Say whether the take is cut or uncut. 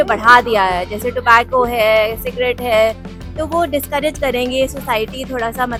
uncut